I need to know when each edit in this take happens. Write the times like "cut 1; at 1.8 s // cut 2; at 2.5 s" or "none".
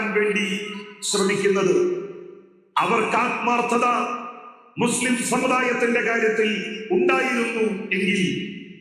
none